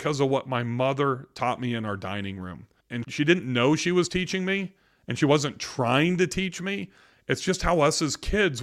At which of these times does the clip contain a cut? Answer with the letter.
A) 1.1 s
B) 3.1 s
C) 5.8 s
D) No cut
B